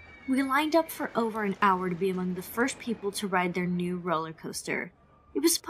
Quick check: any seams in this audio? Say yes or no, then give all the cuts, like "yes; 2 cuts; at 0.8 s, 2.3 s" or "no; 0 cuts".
yes; 1 cut; at 1.7 s